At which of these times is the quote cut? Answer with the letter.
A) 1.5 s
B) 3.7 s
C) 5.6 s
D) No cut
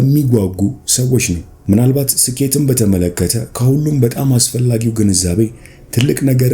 A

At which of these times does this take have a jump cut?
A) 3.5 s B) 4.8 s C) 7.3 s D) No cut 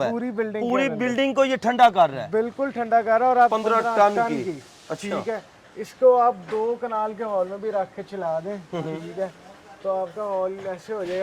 A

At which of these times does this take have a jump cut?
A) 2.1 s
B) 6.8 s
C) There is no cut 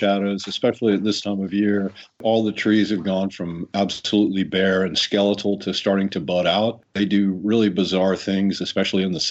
B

